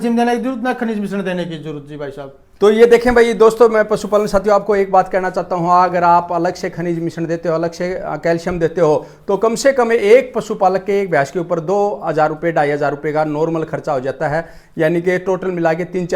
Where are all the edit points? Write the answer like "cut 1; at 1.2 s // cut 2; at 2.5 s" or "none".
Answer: none